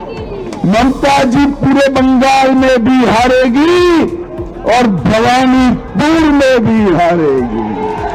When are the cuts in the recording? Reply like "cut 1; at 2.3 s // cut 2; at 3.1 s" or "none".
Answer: none